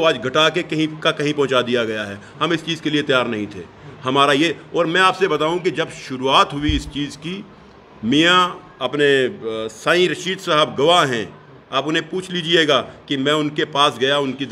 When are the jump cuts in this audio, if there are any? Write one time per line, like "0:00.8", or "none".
none